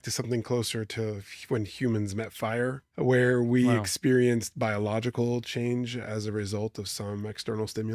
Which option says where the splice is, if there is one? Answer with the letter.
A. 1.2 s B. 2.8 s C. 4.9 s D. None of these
B